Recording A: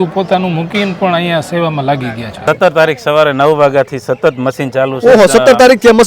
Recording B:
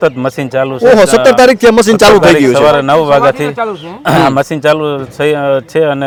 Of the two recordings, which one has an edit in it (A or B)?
A